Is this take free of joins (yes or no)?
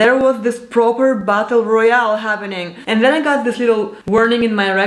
no